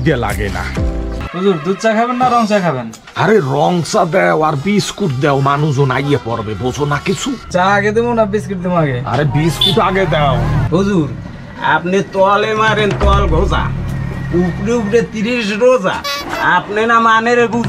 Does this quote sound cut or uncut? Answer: cut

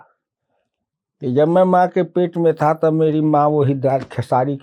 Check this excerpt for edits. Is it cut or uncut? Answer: uncut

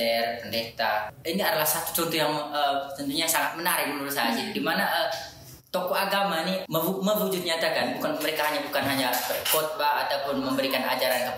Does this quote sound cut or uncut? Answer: cut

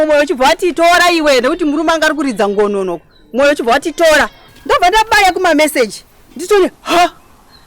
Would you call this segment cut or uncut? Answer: cut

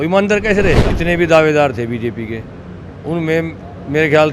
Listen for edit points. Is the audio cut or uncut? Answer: cut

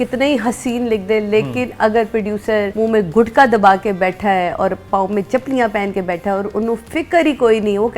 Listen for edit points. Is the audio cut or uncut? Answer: cut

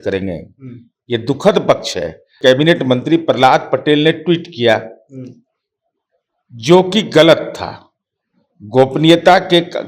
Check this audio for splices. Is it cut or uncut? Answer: cut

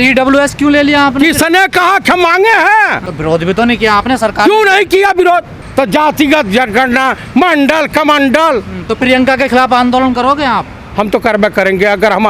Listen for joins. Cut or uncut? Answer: cut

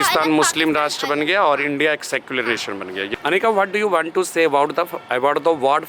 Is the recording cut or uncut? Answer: cut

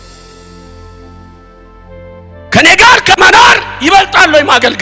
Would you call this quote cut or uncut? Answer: cut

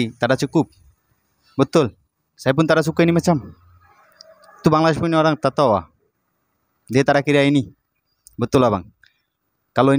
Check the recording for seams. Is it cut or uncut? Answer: uncut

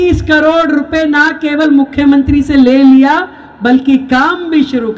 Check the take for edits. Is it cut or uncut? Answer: uncut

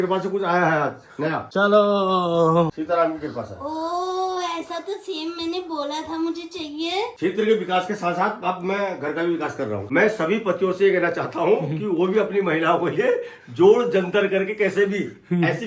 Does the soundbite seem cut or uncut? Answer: cut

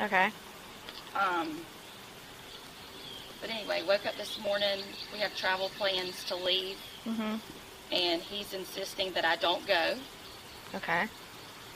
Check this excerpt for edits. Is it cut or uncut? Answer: cut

